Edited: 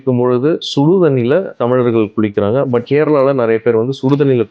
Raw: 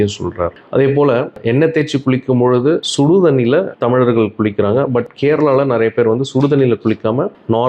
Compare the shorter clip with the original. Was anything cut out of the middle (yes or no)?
yes